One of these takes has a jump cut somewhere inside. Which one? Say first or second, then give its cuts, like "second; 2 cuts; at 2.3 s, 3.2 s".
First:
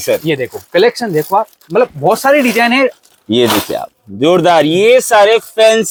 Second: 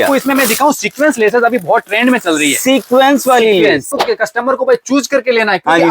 second; 1 cut; at 3.9 s